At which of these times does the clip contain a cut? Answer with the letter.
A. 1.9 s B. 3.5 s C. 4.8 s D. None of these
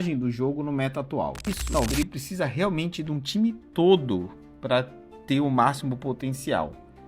A